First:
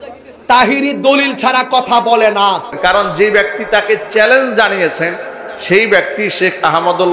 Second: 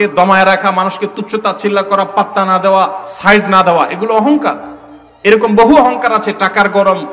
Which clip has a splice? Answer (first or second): first